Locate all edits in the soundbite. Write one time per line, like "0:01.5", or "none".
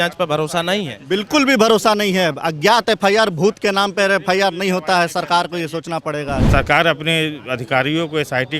0:06.5